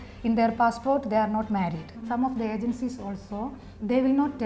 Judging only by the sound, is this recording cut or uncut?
cut